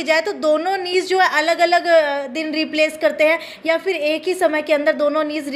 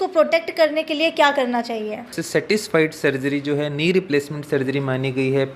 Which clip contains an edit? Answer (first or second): second